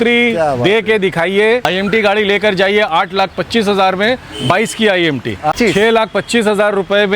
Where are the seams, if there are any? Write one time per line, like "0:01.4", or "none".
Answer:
0:01.6
0:05.5